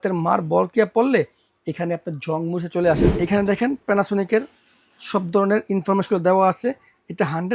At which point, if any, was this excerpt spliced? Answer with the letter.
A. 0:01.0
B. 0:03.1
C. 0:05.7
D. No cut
B